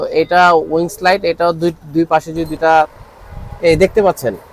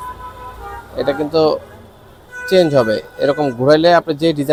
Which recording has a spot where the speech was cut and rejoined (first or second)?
first